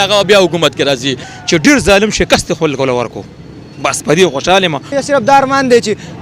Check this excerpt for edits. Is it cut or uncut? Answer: cut